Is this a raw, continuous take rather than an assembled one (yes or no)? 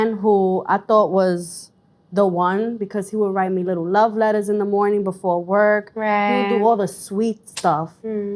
yes